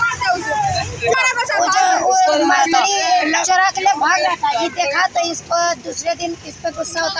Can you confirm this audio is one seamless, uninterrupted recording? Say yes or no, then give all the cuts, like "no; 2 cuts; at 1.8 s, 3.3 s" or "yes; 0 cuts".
no; 1 cut; at 1.1 s